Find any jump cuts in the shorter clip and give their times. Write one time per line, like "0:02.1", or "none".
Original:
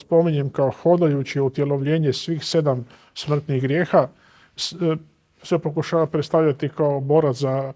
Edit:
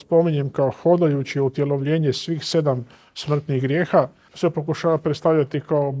0:04.2